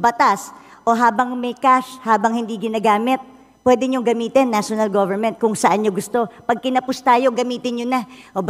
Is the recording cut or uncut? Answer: uncut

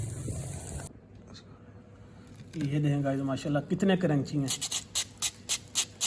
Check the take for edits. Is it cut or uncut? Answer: cut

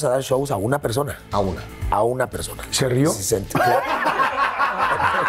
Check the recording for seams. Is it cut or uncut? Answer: uncut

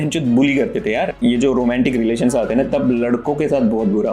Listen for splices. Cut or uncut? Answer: cut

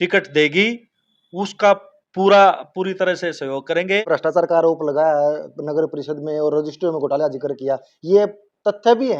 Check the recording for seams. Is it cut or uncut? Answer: cut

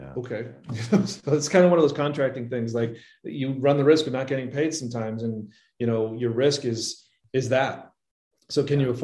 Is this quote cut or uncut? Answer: uncut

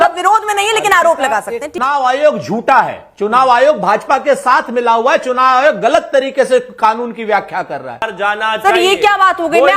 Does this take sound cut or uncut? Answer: cut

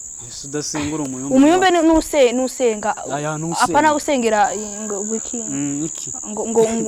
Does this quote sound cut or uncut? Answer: uncut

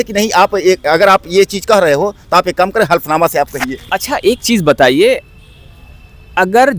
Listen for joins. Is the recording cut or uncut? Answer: uncut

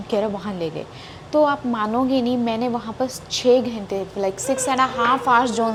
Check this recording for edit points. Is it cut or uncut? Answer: uncut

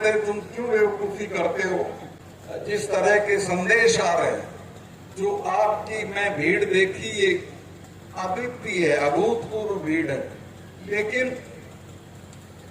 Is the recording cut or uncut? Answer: cut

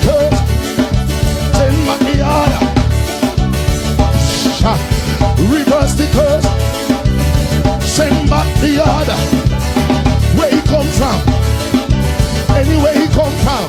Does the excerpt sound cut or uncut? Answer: uncut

